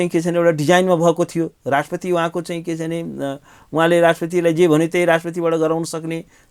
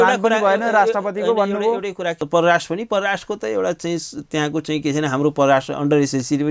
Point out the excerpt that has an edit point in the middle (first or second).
second